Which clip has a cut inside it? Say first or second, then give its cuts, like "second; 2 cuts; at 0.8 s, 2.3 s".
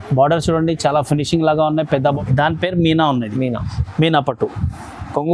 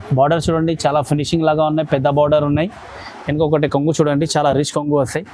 first; 1 cut; at 2.1 s